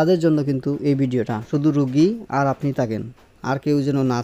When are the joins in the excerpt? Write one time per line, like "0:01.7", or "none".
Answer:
0:01.5